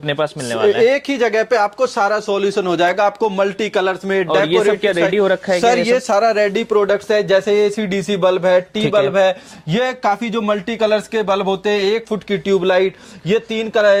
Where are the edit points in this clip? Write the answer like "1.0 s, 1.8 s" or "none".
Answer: none